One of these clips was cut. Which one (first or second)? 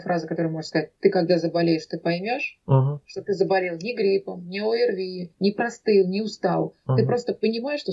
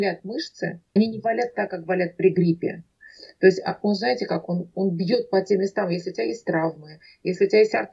second